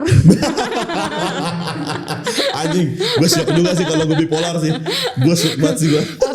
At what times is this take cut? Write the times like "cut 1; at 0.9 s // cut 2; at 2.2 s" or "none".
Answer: none

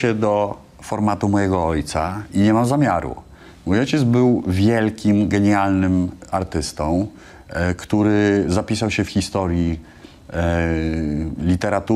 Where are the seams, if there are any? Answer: none

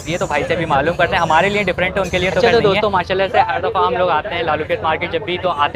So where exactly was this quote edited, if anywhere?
cut 1; at 2.4 s

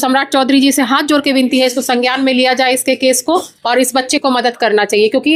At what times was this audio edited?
none

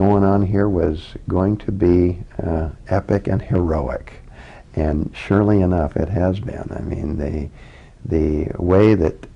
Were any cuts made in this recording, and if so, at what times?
none

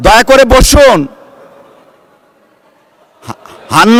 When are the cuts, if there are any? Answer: none

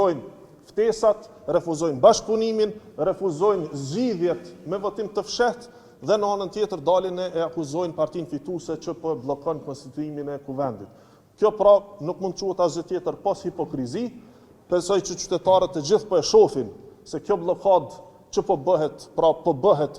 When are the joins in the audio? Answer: none

